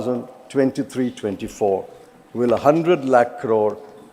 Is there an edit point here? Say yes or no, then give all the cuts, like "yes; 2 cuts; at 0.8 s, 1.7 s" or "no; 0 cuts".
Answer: no; 0 cuts